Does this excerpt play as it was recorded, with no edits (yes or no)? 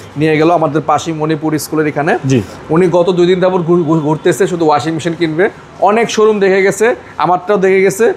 yes